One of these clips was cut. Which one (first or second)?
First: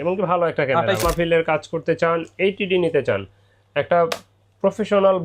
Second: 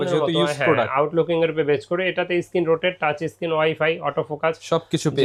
first